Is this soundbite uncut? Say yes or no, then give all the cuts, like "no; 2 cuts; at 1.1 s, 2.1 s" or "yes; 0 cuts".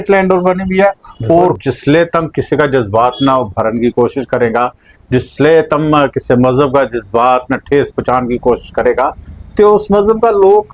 no; 1 cut; at 1.6 s